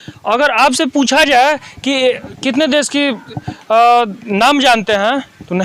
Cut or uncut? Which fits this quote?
uncut